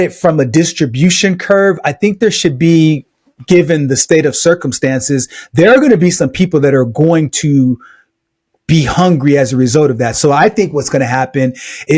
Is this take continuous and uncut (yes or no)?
yes